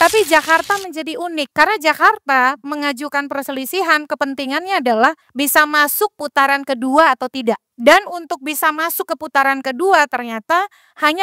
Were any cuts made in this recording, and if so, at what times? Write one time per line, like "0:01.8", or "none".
0:01.4
0:05.2
0:07.7